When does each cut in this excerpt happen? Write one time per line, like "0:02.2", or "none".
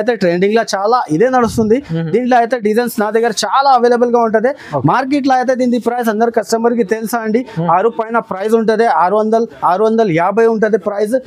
none